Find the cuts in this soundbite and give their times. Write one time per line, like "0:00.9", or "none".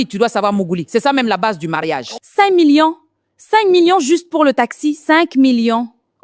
0:02.2